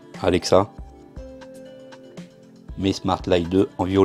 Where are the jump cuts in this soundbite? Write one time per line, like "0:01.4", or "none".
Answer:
0:01.0
0:02.7